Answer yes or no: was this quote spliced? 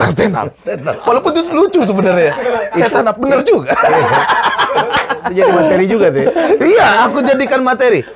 no